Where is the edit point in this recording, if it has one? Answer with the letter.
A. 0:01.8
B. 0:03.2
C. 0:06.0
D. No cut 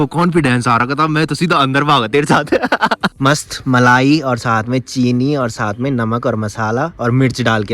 B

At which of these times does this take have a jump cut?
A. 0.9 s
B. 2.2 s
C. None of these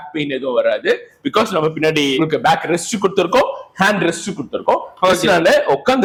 C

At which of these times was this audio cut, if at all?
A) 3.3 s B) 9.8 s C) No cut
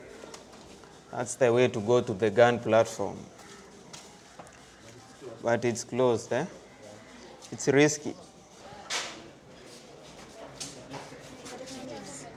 C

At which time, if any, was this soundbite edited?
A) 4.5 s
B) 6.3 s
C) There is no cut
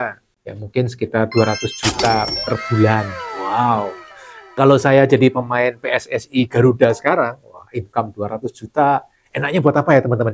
A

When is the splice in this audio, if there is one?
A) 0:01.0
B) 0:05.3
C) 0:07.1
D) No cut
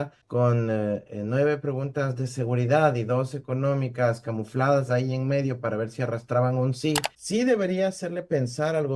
C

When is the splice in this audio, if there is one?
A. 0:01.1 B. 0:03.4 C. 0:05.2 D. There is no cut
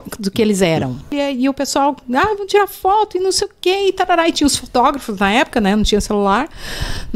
A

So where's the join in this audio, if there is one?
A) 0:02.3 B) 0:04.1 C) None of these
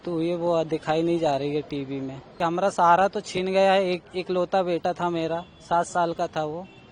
A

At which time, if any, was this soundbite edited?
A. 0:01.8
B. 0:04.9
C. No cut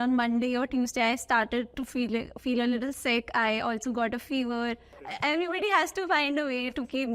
B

